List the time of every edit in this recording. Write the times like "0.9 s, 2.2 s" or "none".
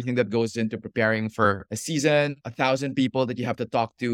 none